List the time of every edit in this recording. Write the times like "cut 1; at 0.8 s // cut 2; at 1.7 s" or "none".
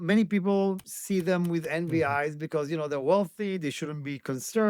cut 1; at 0.9 s